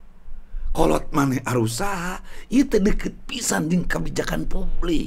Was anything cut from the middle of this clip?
no; 0 cuts

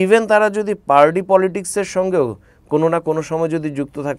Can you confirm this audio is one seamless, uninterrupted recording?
yes; 0 cuts

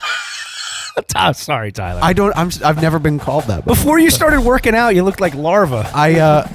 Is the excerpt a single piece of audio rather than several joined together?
yes; 0 cuts

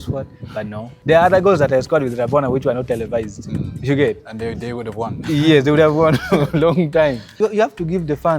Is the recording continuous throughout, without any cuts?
no; 2 cuts; at 0.9 s, 7.3 s

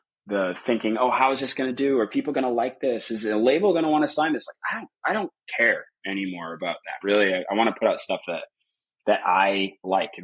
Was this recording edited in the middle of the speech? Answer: no; 0 cuts

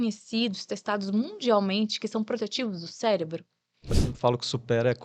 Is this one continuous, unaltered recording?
no; 1 cut; at 4.0 s

